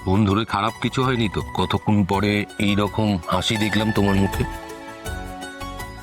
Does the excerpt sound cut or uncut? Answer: cut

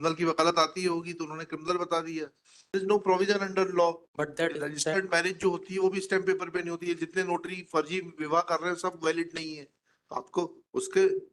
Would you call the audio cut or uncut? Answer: cut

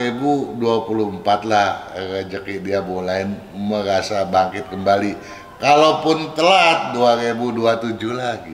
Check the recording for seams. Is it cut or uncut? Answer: uncut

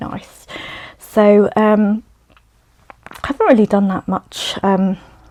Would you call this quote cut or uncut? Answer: uncut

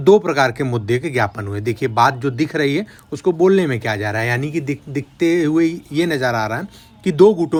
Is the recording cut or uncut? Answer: uncut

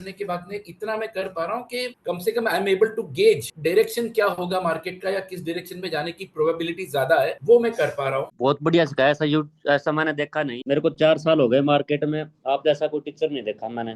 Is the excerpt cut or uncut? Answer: cut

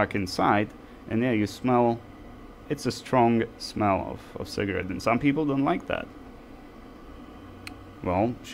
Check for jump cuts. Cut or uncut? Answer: uncut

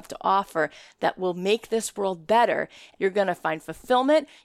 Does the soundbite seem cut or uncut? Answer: cut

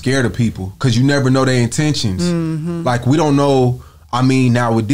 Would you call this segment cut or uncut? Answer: uncut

